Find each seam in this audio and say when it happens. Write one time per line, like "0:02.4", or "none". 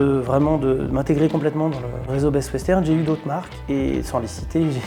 0:02.1